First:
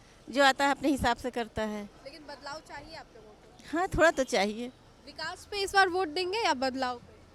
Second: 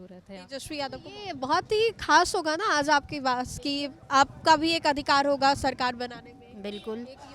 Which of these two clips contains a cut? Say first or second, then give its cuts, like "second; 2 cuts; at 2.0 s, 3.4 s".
second; 1 cut; at 1.0 s